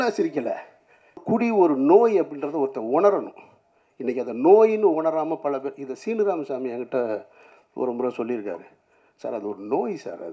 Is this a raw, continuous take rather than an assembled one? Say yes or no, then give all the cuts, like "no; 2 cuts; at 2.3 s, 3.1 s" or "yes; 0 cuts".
no; 1 cut; at 1.2 s